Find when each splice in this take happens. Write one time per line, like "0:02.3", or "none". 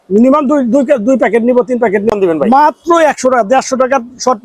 0:02.1